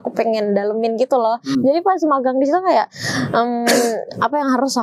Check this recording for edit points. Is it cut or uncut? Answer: uncut